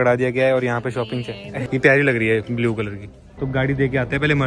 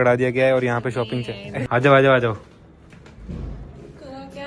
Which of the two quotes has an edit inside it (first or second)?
second